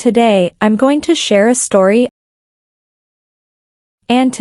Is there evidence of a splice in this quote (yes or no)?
no